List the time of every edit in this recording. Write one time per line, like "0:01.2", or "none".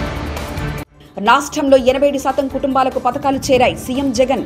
none